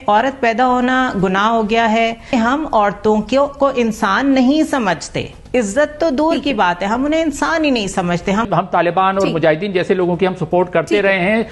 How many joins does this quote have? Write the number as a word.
two